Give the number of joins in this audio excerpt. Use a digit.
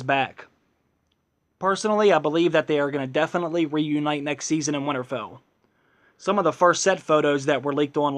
1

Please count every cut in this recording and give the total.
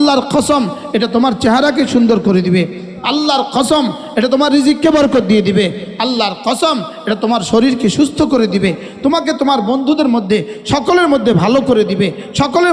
0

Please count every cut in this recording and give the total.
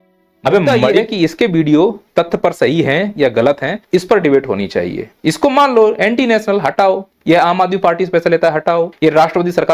6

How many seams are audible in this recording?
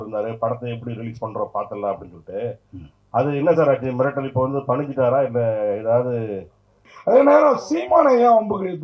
1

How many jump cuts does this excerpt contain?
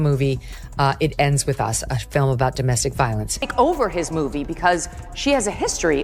1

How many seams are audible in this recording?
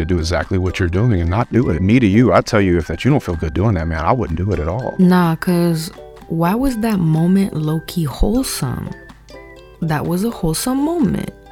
1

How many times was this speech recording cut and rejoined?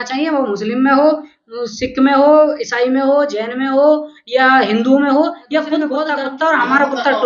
1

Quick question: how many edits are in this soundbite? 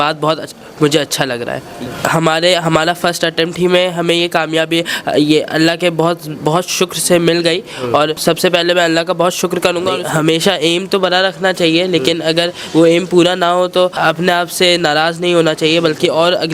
4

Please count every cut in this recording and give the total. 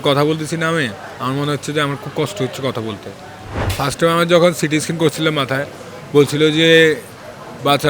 1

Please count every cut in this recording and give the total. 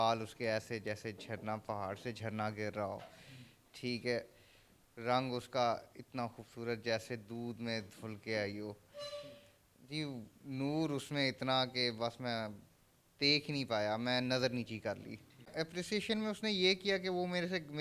1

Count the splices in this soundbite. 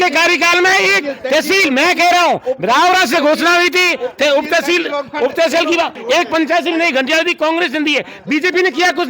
1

